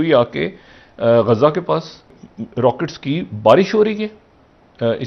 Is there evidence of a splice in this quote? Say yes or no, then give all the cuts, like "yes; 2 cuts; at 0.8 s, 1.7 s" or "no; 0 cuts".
yes; 1 cut; at 2.0 s